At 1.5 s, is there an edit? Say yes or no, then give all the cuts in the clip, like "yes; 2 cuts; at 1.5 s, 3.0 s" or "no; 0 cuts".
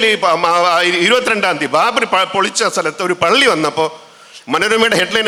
no; 0 cuts